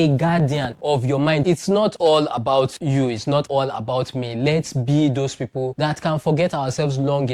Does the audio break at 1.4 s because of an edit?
yes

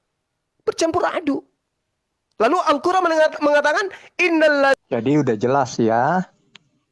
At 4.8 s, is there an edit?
yes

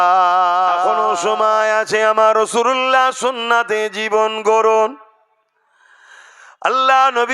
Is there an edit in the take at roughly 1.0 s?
yes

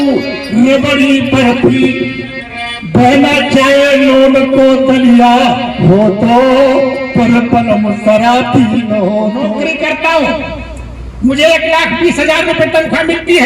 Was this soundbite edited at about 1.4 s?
no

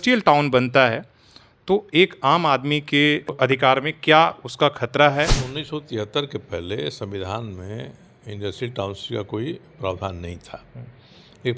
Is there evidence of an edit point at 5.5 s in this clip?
yes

